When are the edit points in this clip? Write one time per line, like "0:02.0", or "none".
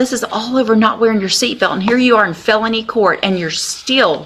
none

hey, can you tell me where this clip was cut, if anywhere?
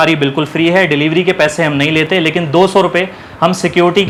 none

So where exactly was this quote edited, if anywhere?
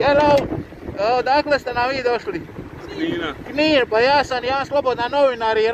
none

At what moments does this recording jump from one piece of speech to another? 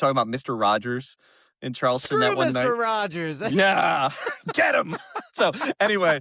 none

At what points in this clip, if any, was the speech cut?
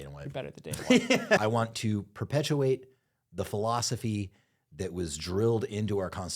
0:01.4

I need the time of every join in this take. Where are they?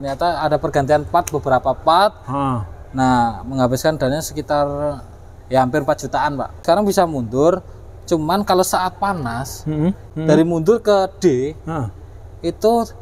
0:06.6
0:10.0

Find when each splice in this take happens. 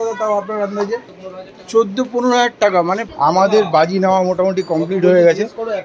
0:01.1
0:03.0

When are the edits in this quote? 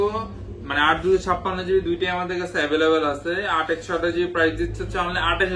none

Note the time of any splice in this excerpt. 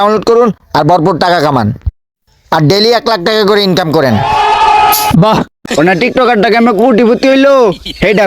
0:05.6

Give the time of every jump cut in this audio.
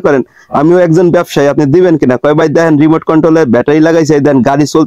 none

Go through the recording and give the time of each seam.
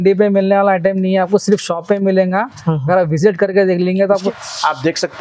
0:04.3

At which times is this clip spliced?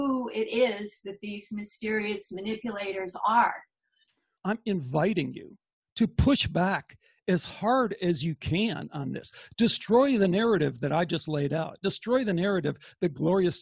0:04.3

